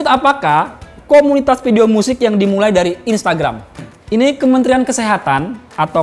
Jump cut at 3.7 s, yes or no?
yes